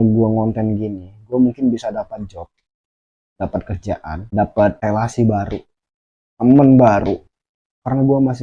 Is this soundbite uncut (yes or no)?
no